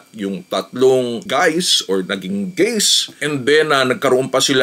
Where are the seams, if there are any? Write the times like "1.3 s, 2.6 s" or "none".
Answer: 3.2 s

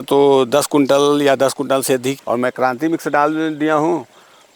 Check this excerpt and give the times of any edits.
2.1 s

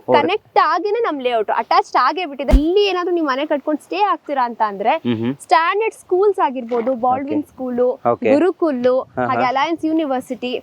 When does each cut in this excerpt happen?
2.5 s

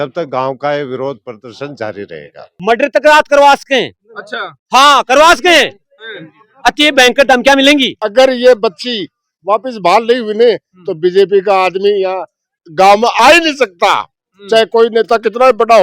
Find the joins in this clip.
2.5 s, 8.0 s

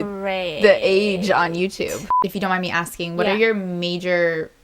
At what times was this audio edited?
2.1 s

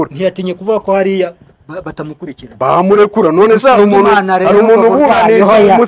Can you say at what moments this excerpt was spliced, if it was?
none

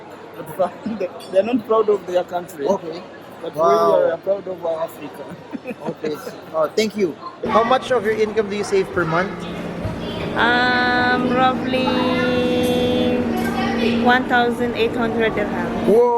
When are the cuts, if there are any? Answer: none

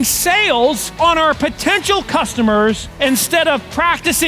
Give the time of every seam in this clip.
0.9 s, 2.9 s

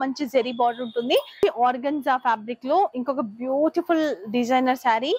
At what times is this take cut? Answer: 1.4 s

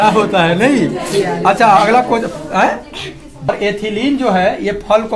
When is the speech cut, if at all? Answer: 3.5 s

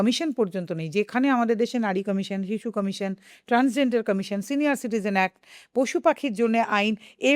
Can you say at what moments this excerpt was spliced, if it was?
none

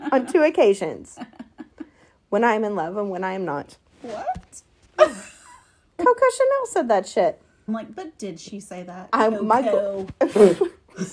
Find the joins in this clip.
7.7 s

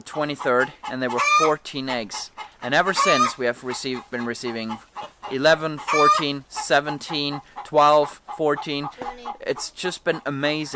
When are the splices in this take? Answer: none

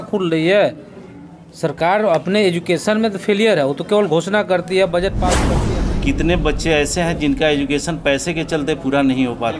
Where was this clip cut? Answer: 5.5 s

